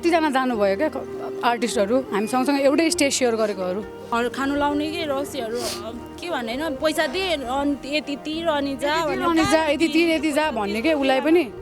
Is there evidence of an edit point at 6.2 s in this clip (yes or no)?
no